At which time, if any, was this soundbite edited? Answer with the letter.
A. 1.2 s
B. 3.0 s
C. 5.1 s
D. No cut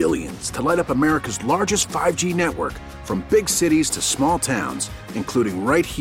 D